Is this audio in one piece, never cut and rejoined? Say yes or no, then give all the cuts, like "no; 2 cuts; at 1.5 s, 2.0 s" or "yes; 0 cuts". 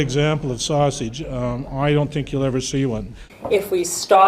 no; 1 cut; at 3.2 s